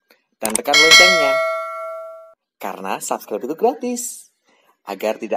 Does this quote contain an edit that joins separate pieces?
no; 0 cuts

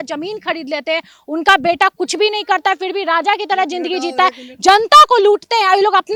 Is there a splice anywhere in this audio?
no; 0 cuts

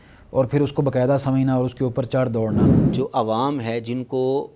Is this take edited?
yes; 1 cut; at 2.8 s

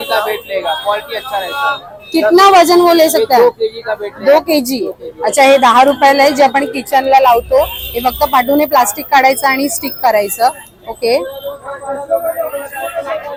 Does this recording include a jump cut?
no; 0 cuts

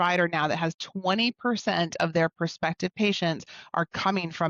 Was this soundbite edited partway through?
no; 0 cuts

